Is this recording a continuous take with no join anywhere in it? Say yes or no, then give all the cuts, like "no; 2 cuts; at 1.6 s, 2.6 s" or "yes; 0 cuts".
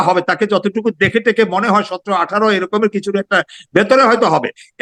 yes; 0 cuts